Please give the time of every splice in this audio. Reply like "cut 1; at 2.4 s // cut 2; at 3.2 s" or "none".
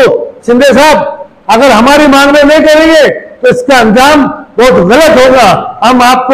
none